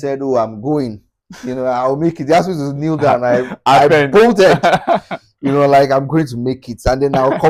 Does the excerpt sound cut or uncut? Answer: uncut